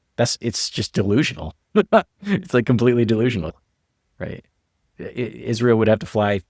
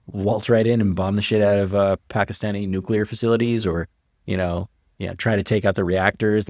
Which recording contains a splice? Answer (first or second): first